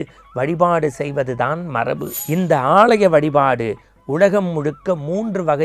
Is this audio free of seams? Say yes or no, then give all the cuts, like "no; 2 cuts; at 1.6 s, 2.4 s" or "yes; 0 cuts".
no; 1 cut; at 2.1 s